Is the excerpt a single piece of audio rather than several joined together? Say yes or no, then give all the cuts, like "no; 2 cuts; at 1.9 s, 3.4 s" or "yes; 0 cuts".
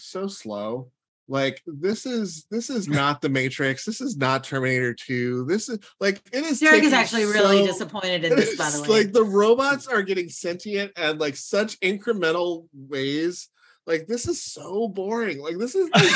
yes; 0 cuts